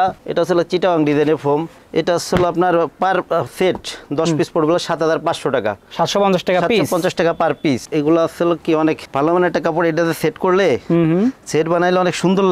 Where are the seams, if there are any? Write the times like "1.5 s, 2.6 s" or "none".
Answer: 7.8 s

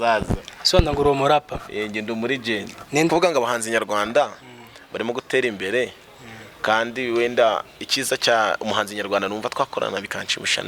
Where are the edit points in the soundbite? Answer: 3.1 s

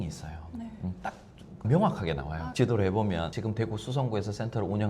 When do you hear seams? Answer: 3.3 s

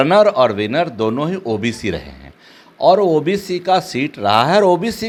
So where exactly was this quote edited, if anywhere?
none

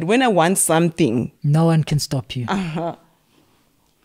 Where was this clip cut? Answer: none

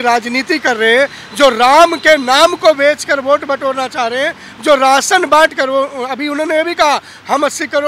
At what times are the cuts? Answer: none

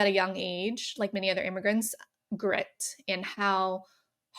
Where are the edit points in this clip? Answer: none

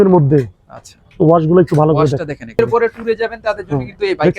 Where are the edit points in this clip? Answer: 2.6 s

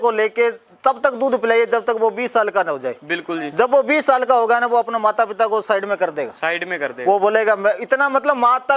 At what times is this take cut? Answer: none

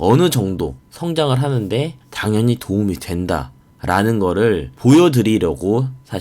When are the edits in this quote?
2.0 s, 4.7 s

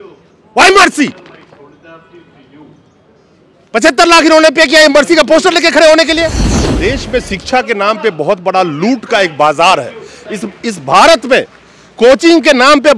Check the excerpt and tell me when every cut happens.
6.7 s

